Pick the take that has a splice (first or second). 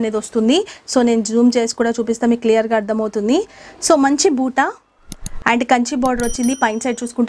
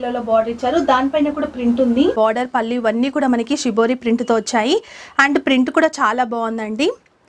second